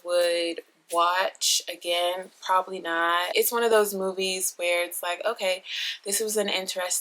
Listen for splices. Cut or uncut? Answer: cut